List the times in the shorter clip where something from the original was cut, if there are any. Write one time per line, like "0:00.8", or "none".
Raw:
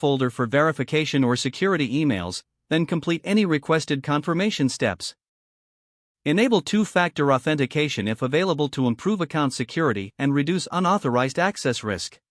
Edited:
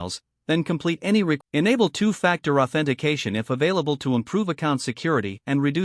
0:01.4